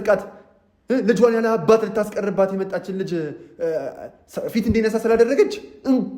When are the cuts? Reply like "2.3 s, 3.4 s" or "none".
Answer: none